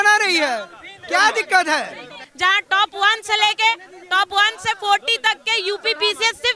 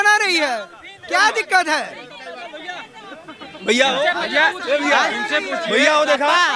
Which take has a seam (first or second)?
first